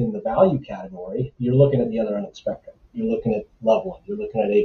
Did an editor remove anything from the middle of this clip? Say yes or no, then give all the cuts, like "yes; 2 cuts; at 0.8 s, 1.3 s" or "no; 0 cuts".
yes; 2 cuts; at 1.3 s, 2.9 s